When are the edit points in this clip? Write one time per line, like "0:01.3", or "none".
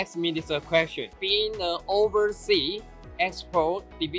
0:01.1